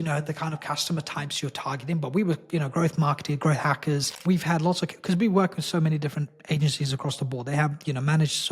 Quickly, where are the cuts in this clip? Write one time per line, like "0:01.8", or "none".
0:04.1